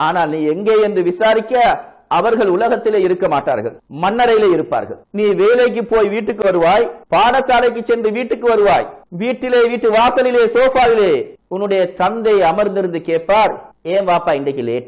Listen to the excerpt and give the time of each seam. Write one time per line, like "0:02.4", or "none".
none